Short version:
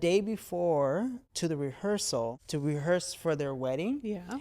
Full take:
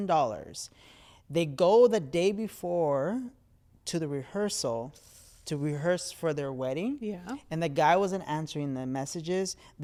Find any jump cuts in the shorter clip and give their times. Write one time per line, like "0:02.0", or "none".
0:01.2
0:02.4